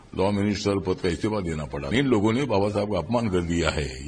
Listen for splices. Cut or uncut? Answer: cut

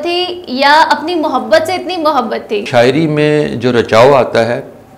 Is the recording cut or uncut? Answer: cut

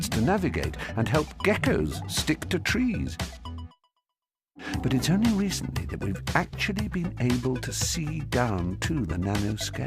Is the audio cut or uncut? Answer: cut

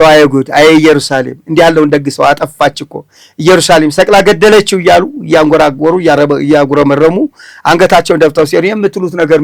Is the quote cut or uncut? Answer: uncut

